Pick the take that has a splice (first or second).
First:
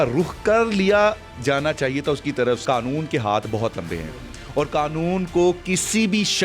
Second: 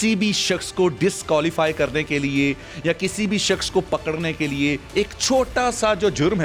first